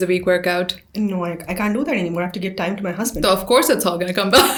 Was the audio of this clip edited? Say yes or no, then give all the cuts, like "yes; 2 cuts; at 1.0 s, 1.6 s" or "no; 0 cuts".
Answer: no; 0 cuts